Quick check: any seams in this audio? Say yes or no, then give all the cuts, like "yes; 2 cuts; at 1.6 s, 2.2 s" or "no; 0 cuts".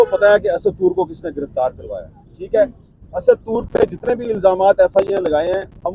no; 0 cuts